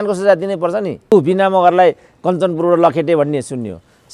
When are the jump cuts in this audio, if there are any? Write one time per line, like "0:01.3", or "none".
0:01.1